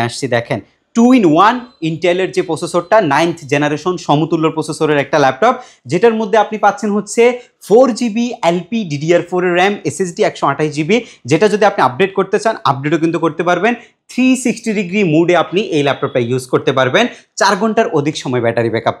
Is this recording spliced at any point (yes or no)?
no